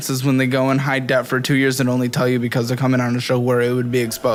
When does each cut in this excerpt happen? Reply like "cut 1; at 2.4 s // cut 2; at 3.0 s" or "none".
none